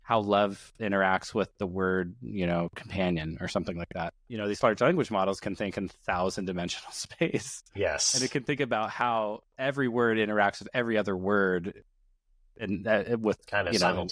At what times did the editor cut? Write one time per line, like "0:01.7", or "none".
0:04.2